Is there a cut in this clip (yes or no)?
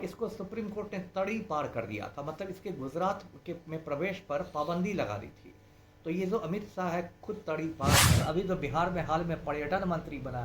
yes